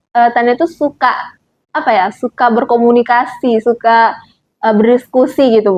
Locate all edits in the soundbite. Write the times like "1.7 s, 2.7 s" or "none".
none